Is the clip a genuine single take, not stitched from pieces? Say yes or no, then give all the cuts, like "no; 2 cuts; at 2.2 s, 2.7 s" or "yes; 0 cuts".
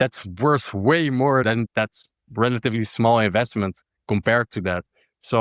no; 1 cut; at 1.7 s